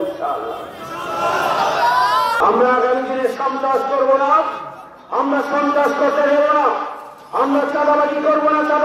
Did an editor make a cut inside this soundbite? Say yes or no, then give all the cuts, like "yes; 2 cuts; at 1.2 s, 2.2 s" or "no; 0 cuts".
yes; 1 cut; at 2.4 s